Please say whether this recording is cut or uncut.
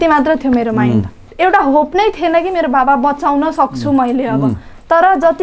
cut